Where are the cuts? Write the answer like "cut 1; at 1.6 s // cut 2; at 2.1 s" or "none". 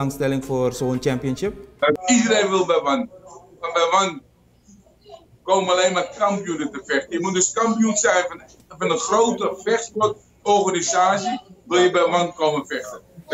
cut 1; at 2.0 s